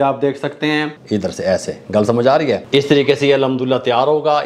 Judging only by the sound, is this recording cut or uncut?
cut